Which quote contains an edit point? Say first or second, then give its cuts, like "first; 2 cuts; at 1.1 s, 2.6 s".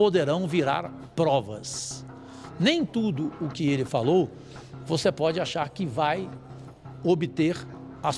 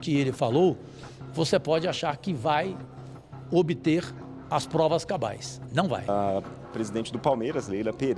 second; 1 cut; at 6.1 s